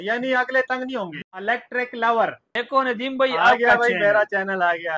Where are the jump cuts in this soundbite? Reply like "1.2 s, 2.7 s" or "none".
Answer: 1.2 s, 2.4 s